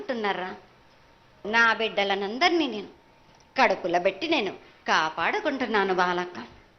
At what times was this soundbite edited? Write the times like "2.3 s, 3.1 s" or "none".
1.4 s

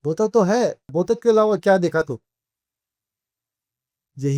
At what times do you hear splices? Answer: 0.9 s

